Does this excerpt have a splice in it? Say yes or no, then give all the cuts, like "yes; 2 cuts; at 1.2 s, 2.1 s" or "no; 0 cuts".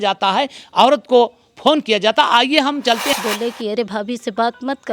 yes; 1 cut; at 3.1 s